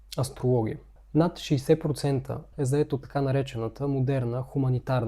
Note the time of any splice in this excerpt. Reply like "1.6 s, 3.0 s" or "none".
0.9 s, 2.5 s